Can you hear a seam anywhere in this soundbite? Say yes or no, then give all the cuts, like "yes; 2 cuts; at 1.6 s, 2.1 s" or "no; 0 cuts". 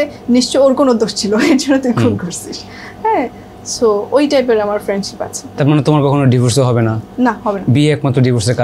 no; 0 cuts